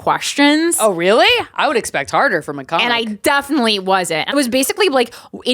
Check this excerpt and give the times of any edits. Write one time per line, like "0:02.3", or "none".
0:04.3